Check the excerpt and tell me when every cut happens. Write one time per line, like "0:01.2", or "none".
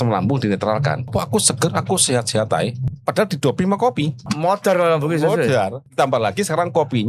0:01.1
0:02.9
0:04.2
0:05.9

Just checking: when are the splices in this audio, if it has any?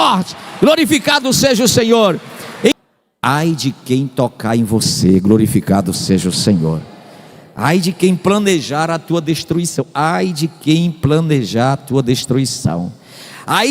0:02.7

